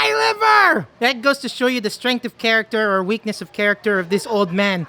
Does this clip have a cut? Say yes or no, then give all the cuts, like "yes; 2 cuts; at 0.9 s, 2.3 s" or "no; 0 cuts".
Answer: yes; 1 cut; at 0.9 s